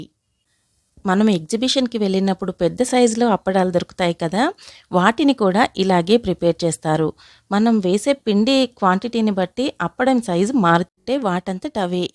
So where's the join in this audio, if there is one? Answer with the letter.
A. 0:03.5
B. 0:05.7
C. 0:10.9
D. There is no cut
C